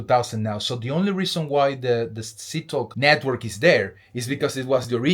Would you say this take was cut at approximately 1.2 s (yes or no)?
no